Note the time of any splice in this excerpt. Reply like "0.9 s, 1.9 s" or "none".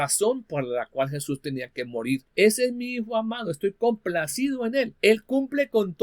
2.3 s, 4.9 s